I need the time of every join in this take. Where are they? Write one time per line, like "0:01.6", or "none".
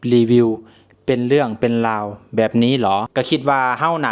0:03.1